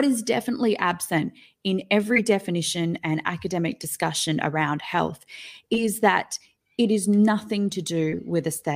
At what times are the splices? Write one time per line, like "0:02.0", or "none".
none